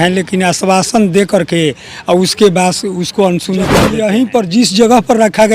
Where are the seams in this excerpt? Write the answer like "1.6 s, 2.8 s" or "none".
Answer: 3.8 s